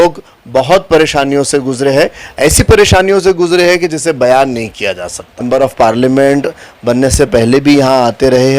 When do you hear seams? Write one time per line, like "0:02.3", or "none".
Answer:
0:05.4